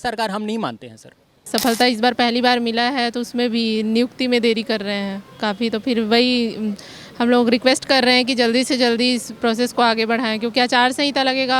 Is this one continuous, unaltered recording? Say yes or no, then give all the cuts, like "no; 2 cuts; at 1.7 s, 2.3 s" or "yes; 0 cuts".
no; 1 cut; at 1.5 s